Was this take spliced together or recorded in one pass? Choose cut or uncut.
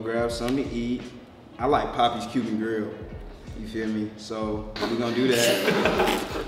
uncut